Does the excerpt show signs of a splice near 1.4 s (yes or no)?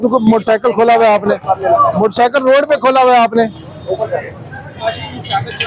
no